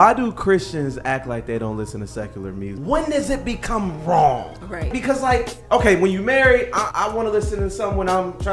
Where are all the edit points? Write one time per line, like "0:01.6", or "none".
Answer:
0:02.7
0:05.0
0:06.9